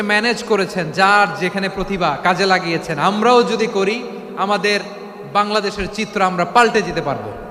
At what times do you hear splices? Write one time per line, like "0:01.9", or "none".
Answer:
none